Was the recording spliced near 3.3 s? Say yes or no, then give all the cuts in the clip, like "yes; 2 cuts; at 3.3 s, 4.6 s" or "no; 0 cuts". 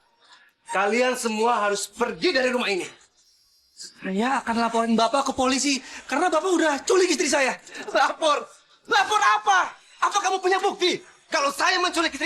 yes; 1 cut; at 3.3 s